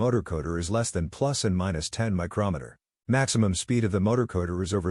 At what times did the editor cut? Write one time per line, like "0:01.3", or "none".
0:03.3